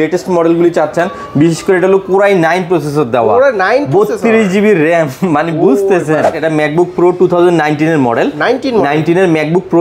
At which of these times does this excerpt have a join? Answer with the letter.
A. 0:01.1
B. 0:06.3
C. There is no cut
B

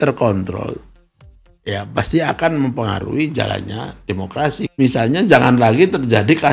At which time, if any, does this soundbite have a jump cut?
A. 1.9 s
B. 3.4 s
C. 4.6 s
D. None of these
C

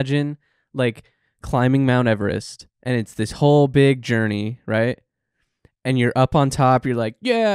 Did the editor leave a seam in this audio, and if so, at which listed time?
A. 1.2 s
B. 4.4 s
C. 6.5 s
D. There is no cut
D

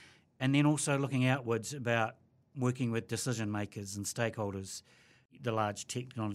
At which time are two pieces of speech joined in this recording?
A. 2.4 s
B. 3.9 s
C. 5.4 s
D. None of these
C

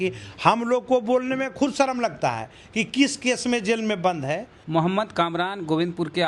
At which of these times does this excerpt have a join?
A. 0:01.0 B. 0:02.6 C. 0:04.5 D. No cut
C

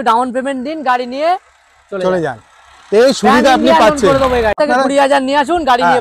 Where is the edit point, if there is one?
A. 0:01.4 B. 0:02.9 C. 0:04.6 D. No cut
C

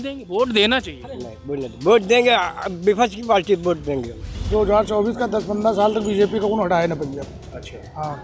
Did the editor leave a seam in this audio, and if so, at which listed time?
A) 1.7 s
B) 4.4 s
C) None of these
B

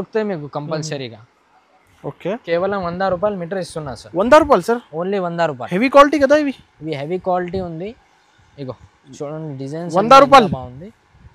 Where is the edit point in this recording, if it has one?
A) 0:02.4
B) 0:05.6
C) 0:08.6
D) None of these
A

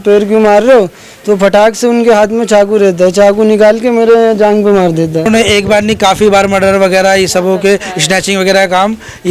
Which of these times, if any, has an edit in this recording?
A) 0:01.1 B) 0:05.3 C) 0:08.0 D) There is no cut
B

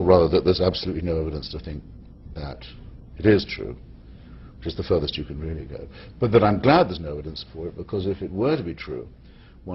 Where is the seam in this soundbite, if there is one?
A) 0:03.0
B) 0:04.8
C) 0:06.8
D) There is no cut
D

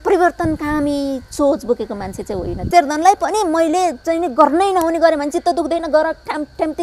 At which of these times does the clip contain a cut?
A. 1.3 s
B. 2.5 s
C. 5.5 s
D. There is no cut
B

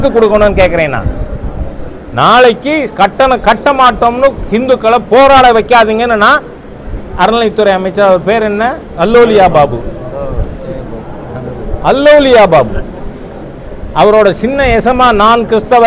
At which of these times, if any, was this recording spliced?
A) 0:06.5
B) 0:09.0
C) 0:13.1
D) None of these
D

